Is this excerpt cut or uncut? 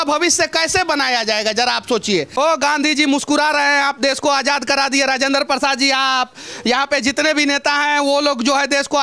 cut